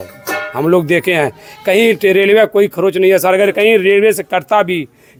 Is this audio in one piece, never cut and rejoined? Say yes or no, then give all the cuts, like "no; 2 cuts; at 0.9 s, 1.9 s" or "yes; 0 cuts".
yes; 0 cuts